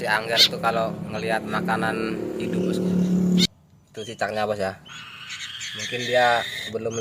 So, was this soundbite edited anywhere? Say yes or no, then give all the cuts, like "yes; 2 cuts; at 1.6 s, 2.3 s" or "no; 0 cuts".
yes; 1 cut; at 3.5 s